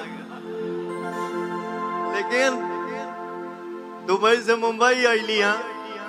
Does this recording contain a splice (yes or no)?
no